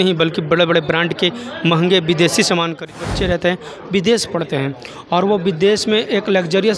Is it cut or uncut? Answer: cut